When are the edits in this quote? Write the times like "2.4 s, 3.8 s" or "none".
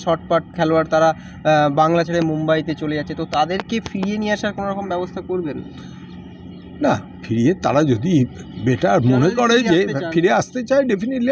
none

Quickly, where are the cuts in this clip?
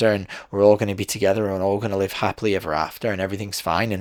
none

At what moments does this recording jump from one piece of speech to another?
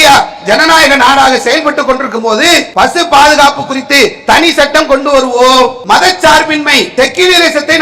2.7 s, 5.8 s, 6.9 s

